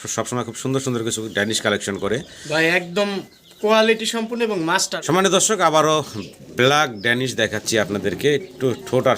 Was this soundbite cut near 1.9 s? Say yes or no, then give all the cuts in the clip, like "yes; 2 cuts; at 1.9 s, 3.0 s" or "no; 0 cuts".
no; 1 cut; at 4.9 s